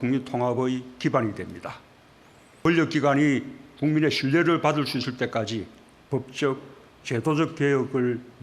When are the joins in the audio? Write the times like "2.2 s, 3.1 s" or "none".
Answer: 2.6 s